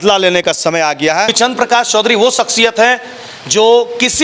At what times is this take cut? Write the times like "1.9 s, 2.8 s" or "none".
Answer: 1.3 s